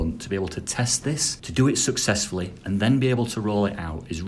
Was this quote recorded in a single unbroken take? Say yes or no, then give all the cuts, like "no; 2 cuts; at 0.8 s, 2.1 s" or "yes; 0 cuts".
no; 1 cut; at 1.3 s